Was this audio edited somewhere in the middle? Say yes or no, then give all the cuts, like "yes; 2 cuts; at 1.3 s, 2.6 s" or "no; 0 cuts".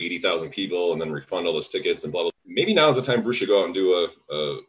yes; 1 cut; at 2.3 s